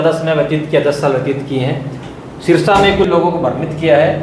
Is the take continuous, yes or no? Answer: no